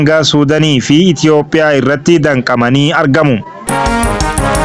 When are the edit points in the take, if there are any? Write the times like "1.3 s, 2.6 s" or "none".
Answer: 3.5 s

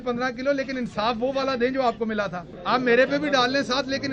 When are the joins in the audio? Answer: 2.5 s

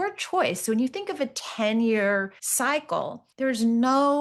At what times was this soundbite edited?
2.4 s, 3.2 s

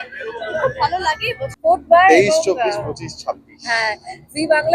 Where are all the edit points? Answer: 1.5 s

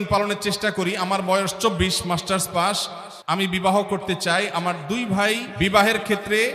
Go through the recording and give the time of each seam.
5.5 s

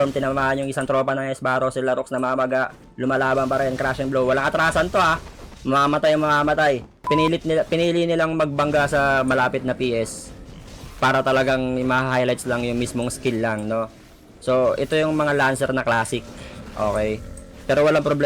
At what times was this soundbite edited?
7.1 s

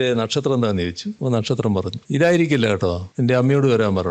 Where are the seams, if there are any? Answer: 1.1 s, 2.0 s, 3.1 s

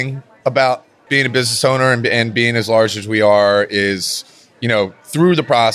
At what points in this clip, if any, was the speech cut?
0.9 s

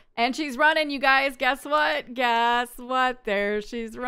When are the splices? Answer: none

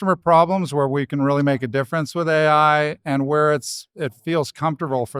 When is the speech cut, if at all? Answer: none

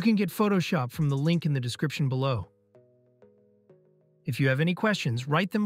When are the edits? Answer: none

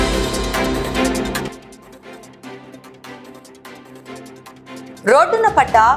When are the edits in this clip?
none

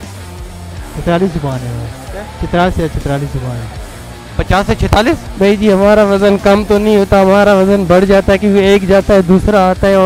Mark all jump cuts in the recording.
5.3 s

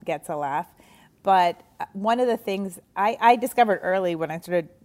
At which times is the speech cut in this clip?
none

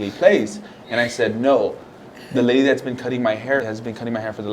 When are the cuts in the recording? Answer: 3.6 s

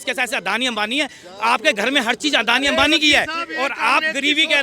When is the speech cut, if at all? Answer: none

